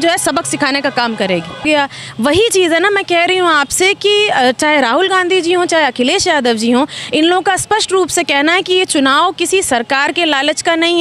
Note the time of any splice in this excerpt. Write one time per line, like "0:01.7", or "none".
0:01.7